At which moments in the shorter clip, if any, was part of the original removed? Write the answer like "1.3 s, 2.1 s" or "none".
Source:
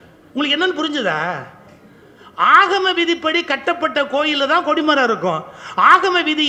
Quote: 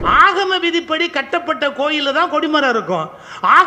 none

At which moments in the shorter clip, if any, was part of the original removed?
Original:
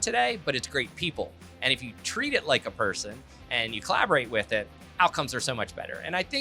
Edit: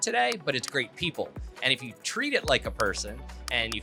none

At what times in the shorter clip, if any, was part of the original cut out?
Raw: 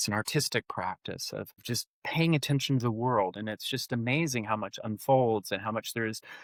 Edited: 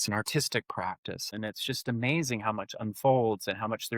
1.3 s

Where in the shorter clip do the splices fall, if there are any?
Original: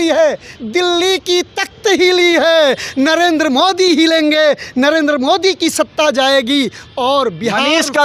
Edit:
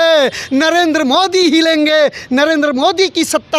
none

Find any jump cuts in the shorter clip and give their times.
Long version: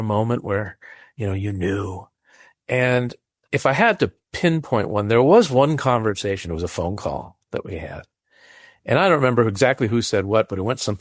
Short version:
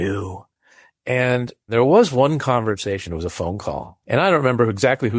1.7 s, 3.9 s

